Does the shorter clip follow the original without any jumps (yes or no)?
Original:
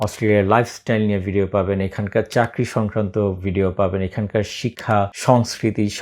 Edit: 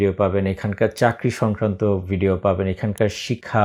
yes